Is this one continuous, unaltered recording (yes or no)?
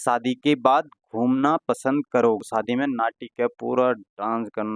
no